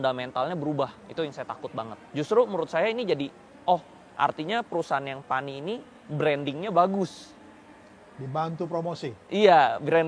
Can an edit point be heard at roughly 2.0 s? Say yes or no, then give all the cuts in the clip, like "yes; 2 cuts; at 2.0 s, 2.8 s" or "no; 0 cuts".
yes; 1 cut; at 2.0 s